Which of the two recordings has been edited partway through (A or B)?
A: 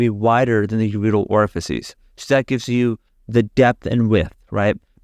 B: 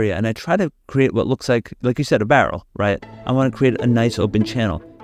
A